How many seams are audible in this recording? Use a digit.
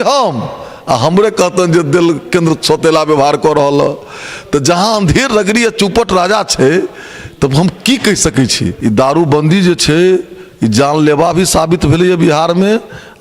1